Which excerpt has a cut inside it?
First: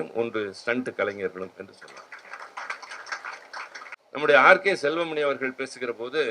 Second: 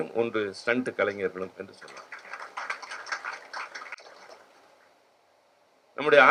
first; 1 cut; at 4.0 s

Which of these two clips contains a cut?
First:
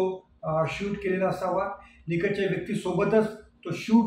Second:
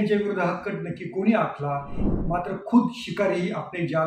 second; 1 cut; at 2.0 s

